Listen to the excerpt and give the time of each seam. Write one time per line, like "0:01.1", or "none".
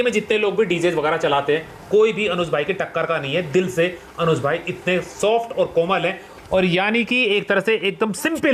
none